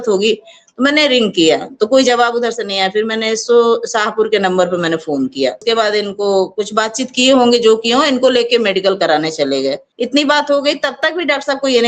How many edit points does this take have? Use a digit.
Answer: 2